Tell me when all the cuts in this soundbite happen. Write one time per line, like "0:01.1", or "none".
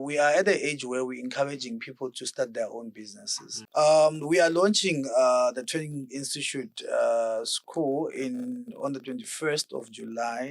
0:03.5